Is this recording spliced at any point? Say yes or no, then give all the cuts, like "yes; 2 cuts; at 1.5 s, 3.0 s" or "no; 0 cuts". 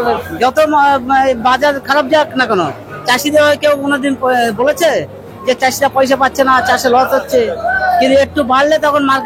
no; 0 cuts